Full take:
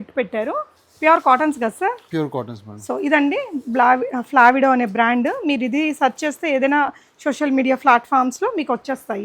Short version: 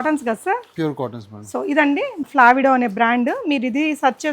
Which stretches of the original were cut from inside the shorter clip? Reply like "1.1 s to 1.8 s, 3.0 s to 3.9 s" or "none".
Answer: 3.6 s to 4.2 s

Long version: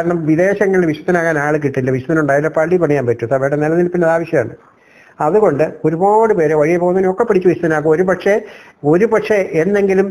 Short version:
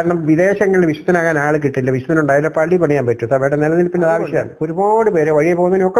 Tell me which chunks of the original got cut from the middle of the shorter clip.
4.6 s to 5.8 s

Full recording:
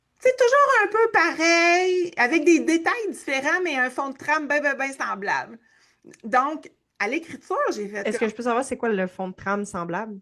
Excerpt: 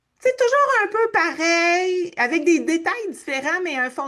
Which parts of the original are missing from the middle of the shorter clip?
none

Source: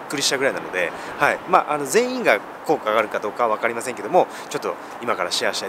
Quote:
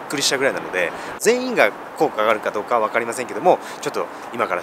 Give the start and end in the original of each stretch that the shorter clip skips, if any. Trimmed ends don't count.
1.1 s to 1.8 s

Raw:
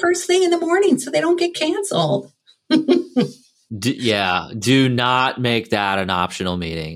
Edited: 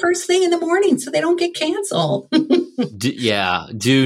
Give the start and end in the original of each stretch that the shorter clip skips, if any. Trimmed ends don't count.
2.2 s to 2.6 s, 3.3 s to 3.8 s

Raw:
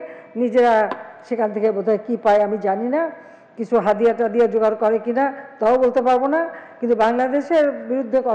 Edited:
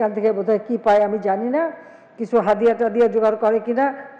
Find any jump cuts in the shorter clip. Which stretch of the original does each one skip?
none

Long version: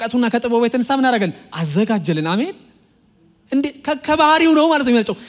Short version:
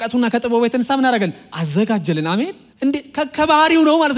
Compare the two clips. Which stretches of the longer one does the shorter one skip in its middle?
2.6 s to 3.3 s

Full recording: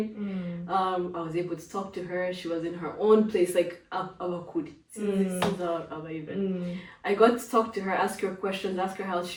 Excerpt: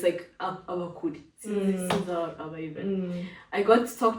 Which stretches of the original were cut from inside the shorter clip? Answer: none

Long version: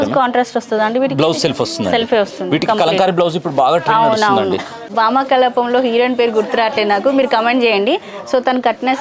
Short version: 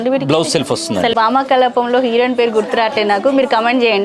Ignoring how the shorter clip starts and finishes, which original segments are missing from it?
2.0 s to 4.9 s

